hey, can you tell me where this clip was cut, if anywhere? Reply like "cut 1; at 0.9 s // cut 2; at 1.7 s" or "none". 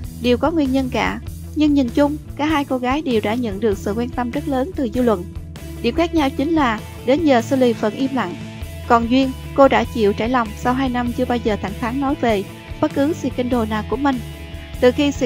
cut 1; at 6.8 s